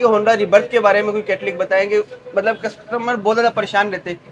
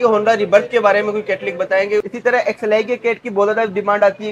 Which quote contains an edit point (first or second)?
second